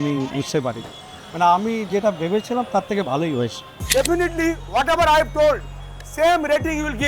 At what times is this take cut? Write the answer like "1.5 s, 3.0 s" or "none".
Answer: 3.8 s